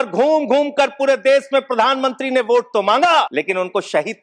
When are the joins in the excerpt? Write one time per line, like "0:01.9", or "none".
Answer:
0:03.3